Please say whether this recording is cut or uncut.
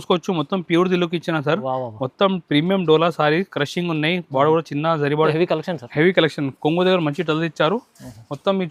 cut